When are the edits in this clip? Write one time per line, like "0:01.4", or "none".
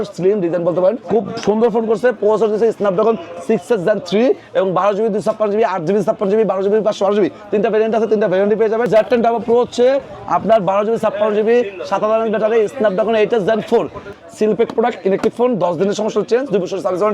0:01.0
0:08.9
0:14.0